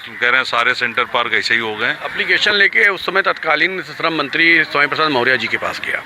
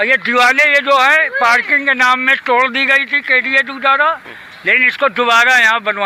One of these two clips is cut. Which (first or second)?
first